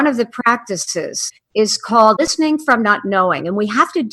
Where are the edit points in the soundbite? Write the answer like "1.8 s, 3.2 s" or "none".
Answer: 1.2 s, 2.2 s